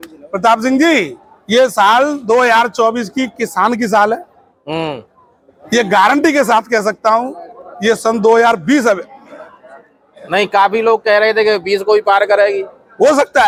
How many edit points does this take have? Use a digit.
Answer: 0